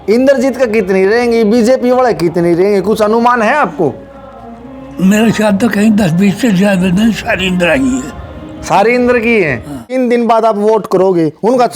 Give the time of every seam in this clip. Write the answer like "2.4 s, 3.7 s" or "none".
9.9 s